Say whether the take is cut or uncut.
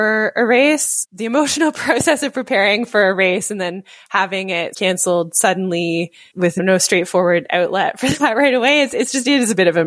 cut